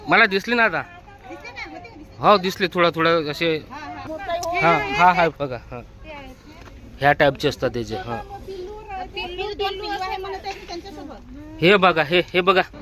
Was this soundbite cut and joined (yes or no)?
yes